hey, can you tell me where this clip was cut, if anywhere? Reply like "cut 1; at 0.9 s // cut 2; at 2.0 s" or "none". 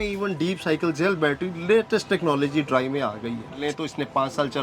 cut 1; at 3.6 s